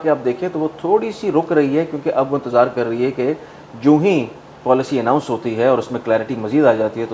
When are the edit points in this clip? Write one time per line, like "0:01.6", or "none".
none